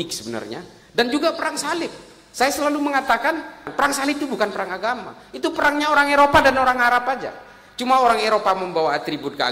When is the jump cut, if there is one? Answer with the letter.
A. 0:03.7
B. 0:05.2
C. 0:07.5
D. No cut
A